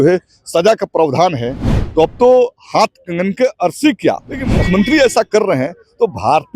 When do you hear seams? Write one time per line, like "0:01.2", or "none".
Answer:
0:04.5